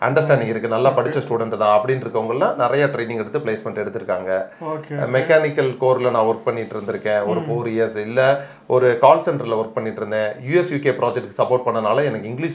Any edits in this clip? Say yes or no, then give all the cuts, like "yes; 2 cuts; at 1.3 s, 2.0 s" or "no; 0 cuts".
no; 0 cuts